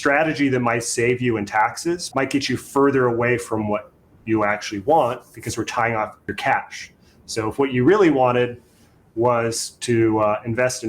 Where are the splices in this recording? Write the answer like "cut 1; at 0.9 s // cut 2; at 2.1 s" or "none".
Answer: cut 1; at 2.0 s // cut 2; at 6.2 s